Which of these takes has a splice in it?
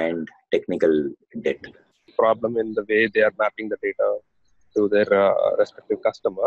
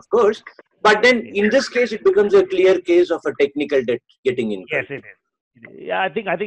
first; 1 cut; at 2.1 s

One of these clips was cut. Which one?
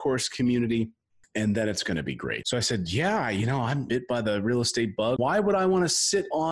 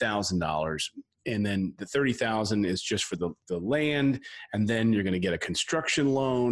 first; 3 cuts; at 2.4 s, 3.9 s, 5.2 s

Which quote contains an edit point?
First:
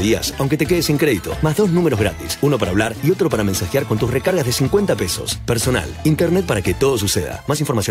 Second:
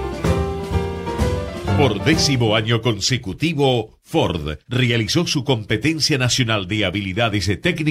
second; 1 cut; at 1.8 s

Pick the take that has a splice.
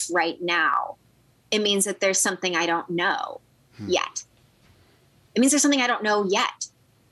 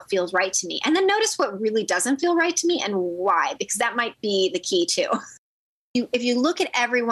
second; 1 cut; at 5.9 s

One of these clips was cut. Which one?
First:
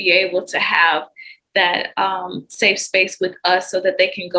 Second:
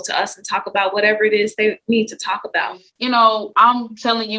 second; 1 cut; at 2.9 s

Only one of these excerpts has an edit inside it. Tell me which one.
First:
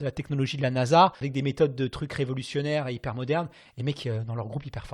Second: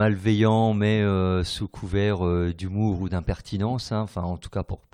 first; 1 cut; at 1.2 s

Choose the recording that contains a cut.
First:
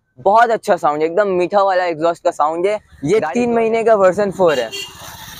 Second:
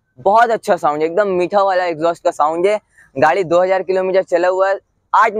first; 1 cut; at 2.9 s

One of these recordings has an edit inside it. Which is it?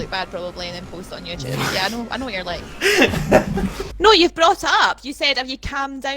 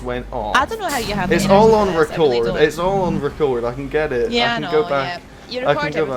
first; 1 cut; at 3.8 s

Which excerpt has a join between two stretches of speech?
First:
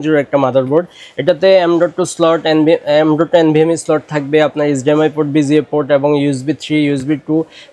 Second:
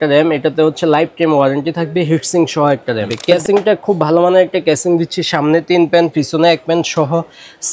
second; 1 cut; at 3.1 s

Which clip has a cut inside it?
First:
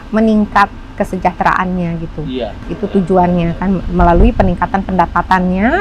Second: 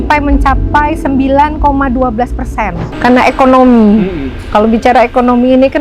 second; 1 cut; at 2.9 s

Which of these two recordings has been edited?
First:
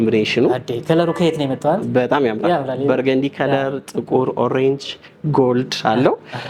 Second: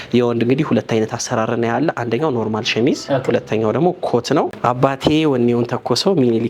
second; 1 cut; at 4.5 s

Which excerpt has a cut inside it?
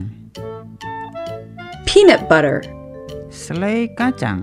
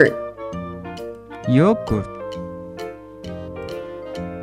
second; 2 cuts; at 2.1 s, 3.7 s

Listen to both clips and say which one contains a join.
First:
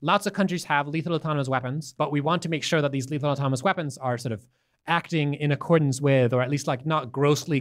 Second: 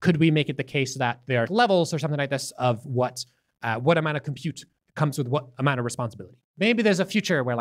second; 2 cuts; at 1.5 s, 6.6 s

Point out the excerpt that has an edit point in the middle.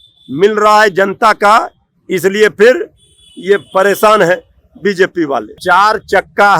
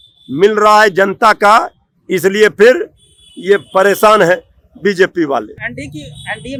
first; 1 cut; at 5.5 s

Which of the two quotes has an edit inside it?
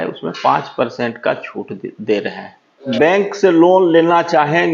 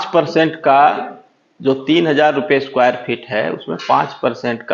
first; 1 cut; at 2.8 s

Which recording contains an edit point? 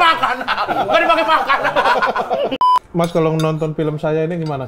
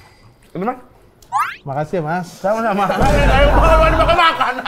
first; 1 cut; at 2.5 s

